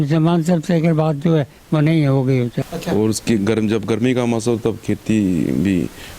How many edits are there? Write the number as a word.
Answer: one